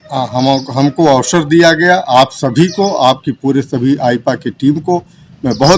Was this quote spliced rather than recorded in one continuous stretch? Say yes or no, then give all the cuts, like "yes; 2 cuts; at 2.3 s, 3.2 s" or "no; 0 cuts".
no; 0 cuts